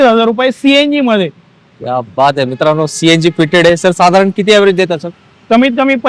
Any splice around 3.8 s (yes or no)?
no